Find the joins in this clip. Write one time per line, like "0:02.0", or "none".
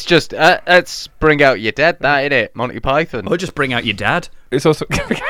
0:03.2